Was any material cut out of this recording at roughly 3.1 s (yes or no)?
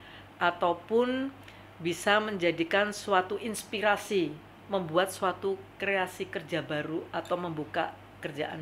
no